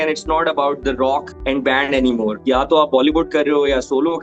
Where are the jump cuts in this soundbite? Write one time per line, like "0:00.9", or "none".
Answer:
0:01.3
0:02.4